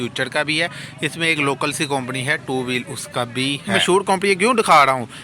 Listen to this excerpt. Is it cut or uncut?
cut